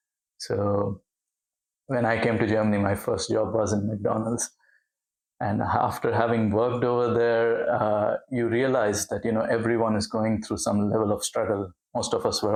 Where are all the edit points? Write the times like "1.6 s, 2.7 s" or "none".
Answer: none

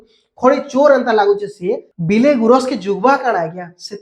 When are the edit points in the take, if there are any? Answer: 1.9 s

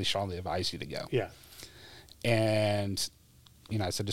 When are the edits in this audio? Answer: none

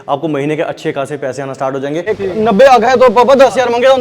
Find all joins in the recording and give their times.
2.0 s

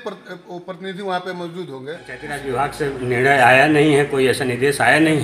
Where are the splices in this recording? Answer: 2.3 s

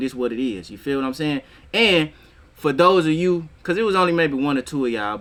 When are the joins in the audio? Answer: none

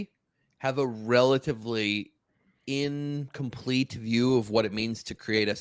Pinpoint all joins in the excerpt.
none

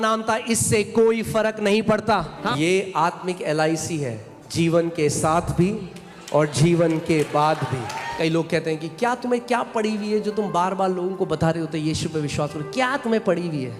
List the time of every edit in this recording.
2.4 s, 8.1 s

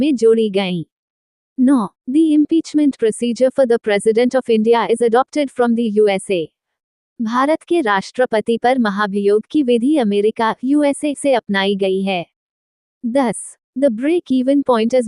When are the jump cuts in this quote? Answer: 1.6 s, 13.1 s

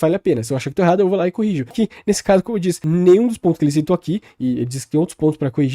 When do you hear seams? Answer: 1.7 s, 2.8 s

